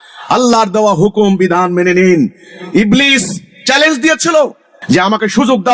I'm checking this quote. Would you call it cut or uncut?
uncut